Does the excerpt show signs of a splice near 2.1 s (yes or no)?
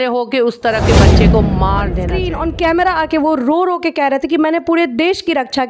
yes